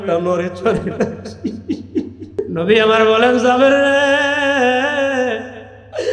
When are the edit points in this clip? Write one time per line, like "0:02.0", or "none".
0:02.3